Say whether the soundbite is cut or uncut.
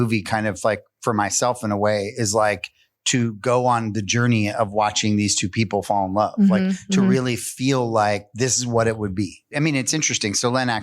cut